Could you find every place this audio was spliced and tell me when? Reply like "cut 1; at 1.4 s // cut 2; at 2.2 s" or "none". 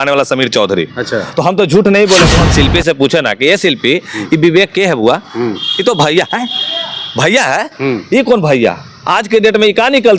cut 1; at 2.4 s